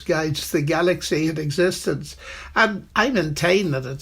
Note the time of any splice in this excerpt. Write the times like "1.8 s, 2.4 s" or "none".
2.8 s